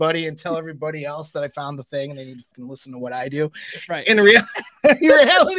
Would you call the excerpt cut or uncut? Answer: cut